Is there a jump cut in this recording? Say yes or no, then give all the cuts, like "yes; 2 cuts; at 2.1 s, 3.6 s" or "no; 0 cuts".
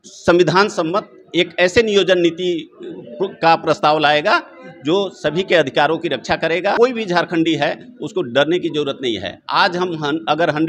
yes; 1 cut; at 6.8 s